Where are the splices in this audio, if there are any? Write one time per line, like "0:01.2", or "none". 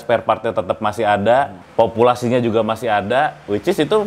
0:01.6